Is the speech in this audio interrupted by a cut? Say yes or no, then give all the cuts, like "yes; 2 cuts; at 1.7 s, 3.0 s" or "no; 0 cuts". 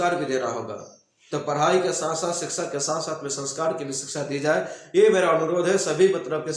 no; 0 cuts